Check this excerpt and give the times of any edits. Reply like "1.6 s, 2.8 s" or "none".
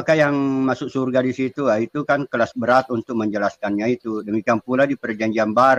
none

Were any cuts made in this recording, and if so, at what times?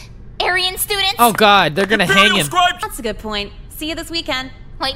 2.8 s

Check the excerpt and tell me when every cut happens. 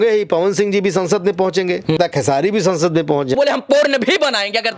2.0 s, 3.4 s

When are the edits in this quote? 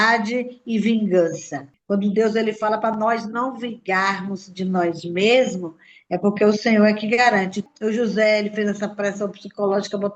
1.7 s, 7.6 s

